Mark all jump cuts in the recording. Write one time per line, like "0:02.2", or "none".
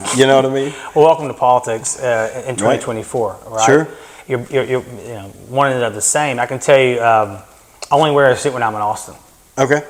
none